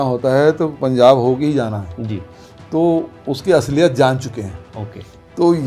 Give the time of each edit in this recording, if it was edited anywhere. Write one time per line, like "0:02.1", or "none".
none